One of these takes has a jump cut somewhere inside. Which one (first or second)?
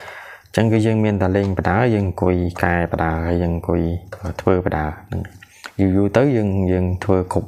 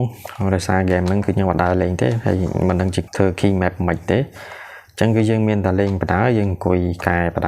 second